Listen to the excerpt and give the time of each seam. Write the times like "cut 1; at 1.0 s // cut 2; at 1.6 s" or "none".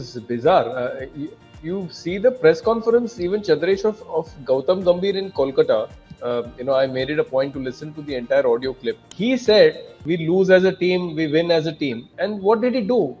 cut 1; at 9.1 s // cut 2; at 10.0 s // cut 3; at 12.0 s